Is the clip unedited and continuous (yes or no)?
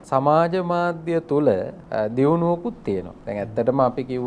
no